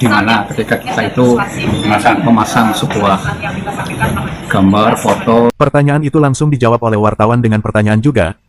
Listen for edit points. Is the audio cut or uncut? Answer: uncut